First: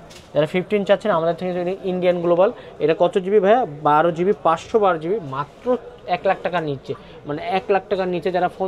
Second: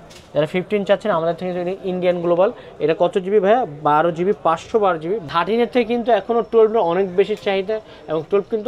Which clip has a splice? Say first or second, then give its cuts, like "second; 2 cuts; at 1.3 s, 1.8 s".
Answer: second; 1 cut; at 5.3 s